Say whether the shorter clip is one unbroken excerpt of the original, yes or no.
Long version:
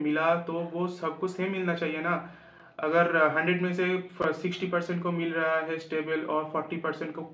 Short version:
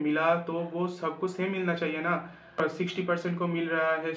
no